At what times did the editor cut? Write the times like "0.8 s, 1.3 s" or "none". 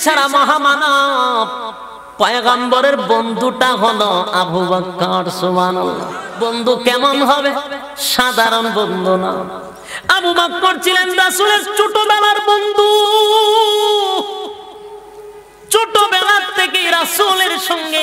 6.2 s